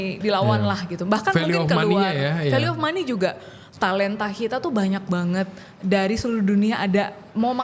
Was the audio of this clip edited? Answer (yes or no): no